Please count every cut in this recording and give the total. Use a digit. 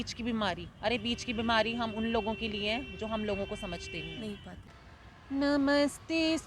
1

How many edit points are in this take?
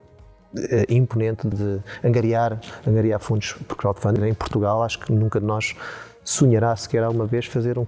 2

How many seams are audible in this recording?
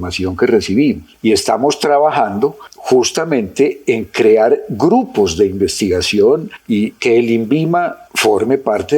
2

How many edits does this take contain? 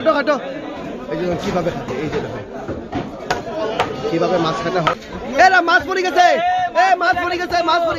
1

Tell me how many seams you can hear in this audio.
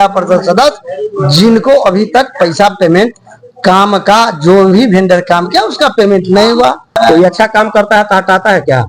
1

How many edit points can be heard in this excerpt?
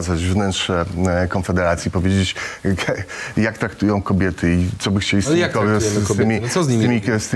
0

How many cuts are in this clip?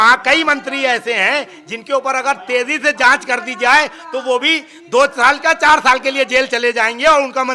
0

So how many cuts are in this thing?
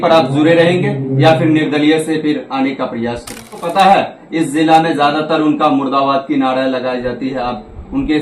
1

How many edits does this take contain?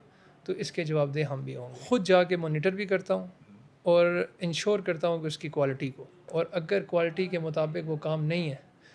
2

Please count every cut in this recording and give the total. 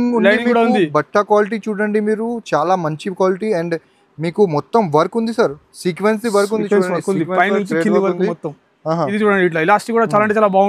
1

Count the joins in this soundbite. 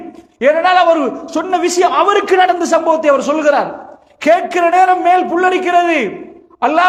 0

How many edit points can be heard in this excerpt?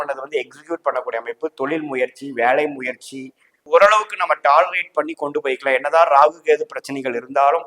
1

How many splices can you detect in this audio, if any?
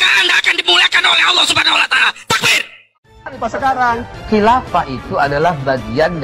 1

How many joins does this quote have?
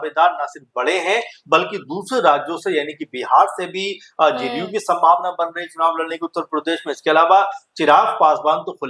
0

